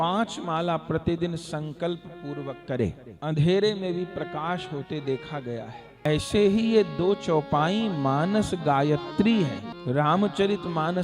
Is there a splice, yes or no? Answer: yes